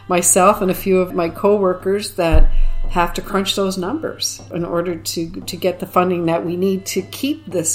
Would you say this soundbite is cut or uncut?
cut